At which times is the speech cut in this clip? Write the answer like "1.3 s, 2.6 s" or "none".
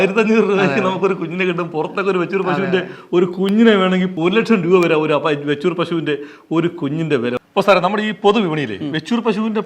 4.1 s, 7.4 s